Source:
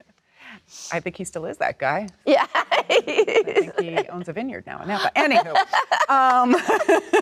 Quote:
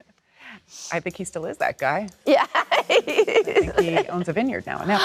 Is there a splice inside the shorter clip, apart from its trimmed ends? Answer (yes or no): no